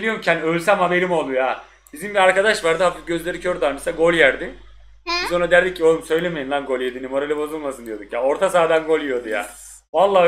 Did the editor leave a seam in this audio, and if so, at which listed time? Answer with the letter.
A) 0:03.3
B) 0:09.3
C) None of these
C